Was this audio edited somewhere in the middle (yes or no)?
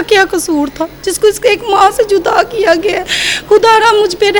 no